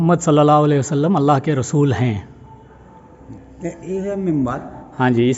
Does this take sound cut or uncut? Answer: uncut